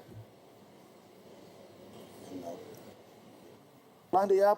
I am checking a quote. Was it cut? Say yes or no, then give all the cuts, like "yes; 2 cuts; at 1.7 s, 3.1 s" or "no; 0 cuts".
yes; 1 cut; at 2.6 s